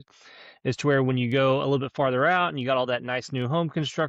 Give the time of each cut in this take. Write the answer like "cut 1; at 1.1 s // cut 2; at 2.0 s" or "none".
none